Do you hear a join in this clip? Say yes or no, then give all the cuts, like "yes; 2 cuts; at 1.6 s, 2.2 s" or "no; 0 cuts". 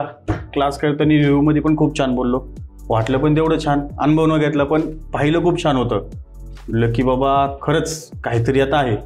no; 0 cuts